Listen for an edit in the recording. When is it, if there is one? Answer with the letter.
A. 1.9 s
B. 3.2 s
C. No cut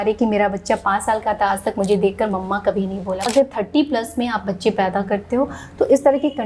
B